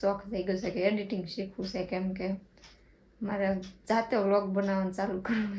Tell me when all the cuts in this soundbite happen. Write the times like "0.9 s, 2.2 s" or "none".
none